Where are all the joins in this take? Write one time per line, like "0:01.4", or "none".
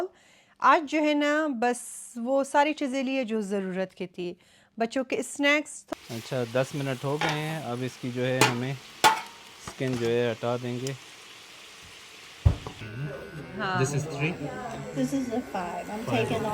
0:05.8
0:12.8